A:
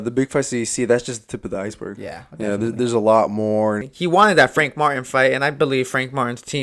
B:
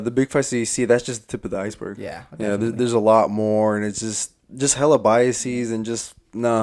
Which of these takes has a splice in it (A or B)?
A